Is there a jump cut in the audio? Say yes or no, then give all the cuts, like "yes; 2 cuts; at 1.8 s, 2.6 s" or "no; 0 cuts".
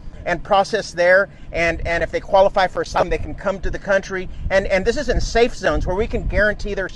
yes; 1 cut; at 3.0 s